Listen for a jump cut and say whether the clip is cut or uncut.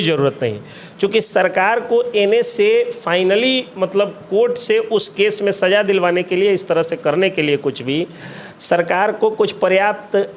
uncut